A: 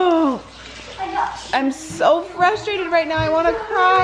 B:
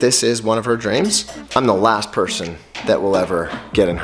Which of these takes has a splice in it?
B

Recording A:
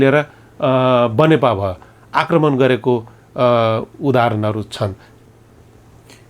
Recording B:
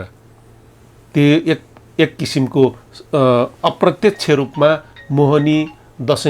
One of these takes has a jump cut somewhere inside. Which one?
A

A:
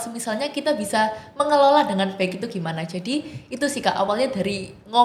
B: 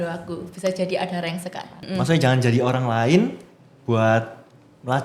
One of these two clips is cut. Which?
B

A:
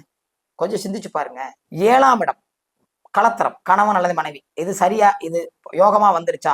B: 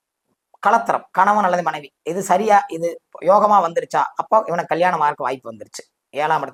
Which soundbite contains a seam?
A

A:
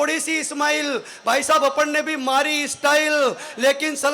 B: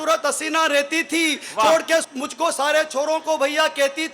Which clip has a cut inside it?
B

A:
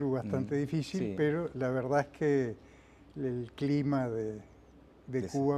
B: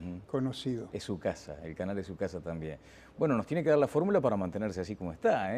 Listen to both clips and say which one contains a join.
B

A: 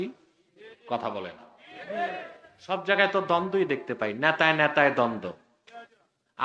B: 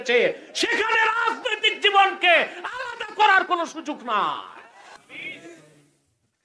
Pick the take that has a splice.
B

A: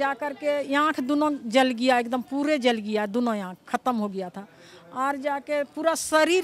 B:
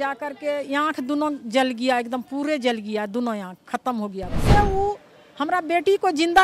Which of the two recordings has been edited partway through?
B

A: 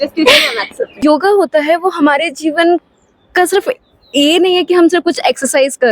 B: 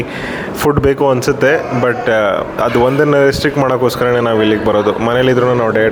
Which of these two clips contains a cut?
A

